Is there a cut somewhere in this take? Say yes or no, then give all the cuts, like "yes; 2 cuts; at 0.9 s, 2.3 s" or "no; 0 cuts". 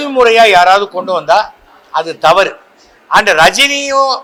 no; 0 cuts